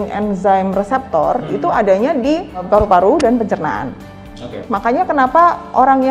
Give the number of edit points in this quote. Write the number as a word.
two